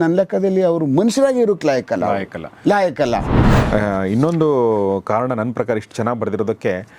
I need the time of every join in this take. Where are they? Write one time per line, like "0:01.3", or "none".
0:03.3